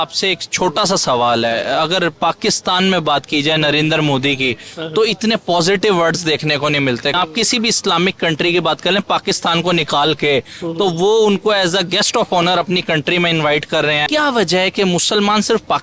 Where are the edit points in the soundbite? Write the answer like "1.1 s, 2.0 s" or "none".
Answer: 7.1 s, 14.0 s